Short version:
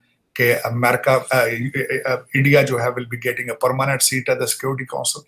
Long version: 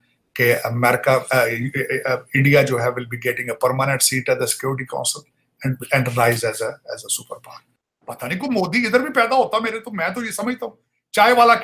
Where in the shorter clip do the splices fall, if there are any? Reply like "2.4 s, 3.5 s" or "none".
none